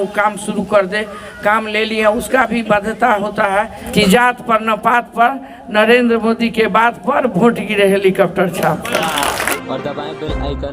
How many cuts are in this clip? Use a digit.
2